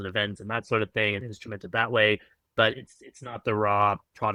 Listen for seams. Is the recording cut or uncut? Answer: uncut